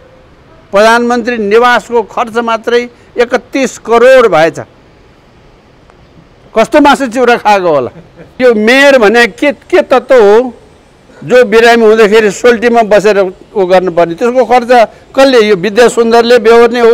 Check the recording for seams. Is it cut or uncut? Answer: cut